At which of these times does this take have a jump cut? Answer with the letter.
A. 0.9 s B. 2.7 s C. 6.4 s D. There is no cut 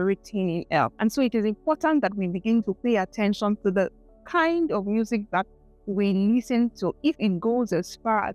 A